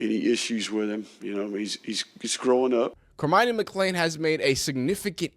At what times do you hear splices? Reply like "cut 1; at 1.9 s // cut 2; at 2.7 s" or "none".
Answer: cut 1; at 3.1 s